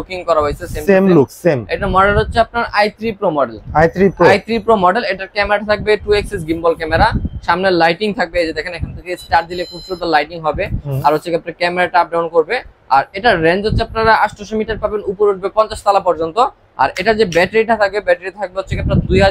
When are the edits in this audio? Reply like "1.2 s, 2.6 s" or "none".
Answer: none